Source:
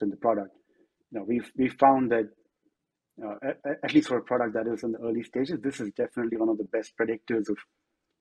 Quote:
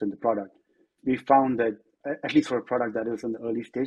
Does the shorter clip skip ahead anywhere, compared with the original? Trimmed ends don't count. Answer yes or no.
yes